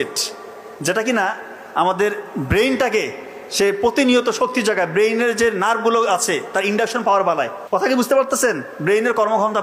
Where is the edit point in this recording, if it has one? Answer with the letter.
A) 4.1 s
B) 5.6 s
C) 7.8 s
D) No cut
C